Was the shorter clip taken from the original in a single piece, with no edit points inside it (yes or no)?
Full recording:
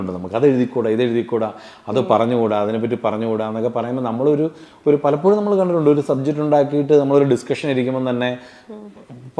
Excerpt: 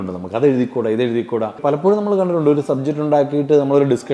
no